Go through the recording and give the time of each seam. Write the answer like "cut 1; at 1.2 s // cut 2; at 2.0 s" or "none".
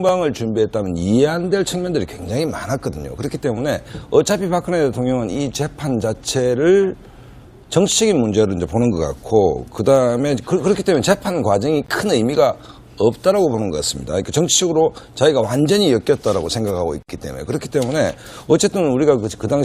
cut 1; at 5.5 s